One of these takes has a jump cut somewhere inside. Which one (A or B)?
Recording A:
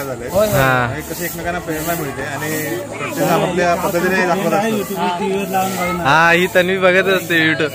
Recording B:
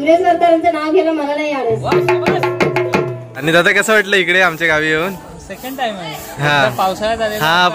B